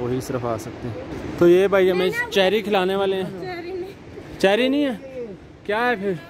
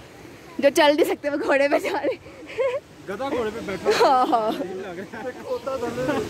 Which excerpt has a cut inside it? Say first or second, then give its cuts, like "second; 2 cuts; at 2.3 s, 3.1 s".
first; 1 cut; at 1.1 s